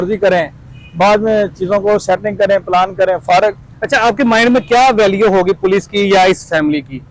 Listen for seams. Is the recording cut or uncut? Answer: uncut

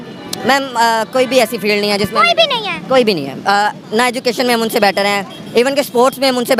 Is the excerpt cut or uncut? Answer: uncut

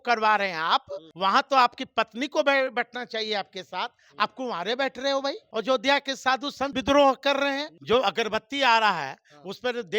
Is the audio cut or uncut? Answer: cut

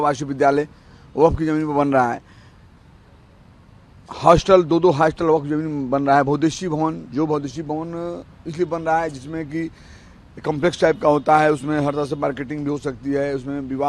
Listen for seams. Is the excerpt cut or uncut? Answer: uncut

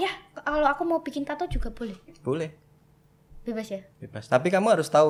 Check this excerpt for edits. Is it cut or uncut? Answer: uncut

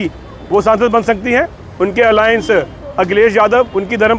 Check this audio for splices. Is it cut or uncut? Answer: uncut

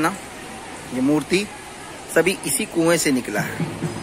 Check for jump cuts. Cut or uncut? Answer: uncut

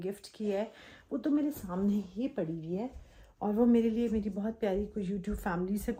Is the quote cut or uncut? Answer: uncut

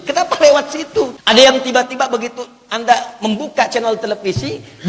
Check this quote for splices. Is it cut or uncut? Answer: cut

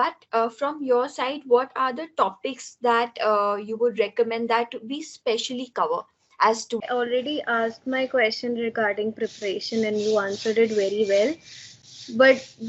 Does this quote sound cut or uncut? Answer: cut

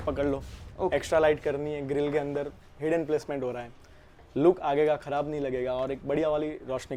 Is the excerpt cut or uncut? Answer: uncut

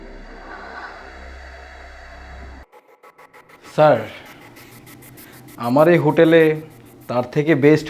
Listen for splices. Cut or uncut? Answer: cut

